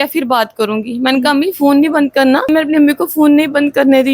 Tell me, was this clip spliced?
yes; 1 cut; at 2.5 s

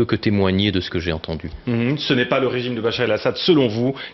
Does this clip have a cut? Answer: yes; 1 cut; at 2.3 s

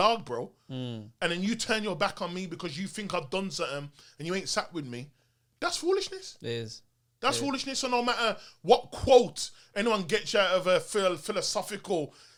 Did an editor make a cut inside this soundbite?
no; 0 cuts

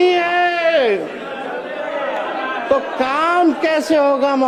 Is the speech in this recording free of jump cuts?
yes; 0 cuts

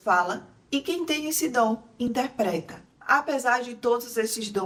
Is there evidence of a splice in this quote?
no; 0 cuts

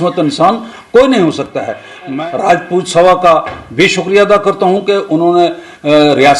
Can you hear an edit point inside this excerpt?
yes; 1 cut; at 2.1 s

